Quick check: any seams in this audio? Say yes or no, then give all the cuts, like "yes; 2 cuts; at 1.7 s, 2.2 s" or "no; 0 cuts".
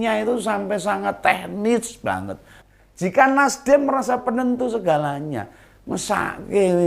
yes; 1 cut; at 2.5 s